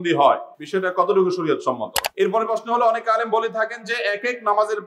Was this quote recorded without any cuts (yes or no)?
no